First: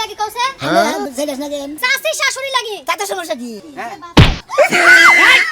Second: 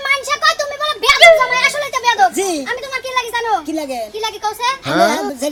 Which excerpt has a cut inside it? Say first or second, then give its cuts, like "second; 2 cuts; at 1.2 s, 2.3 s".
first; 1 cut; at 3.6 s